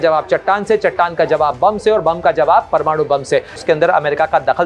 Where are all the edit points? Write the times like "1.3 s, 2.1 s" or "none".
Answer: 3.6 s